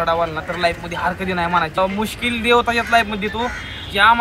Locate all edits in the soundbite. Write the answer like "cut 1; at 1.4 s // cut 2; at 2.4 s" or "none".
cut 1; at 1.8 s